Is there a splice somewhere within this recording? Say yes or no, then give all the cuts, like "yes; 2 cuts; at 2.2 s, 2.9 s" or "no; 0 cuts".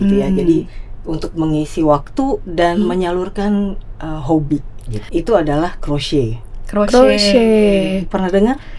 no; 0 cuts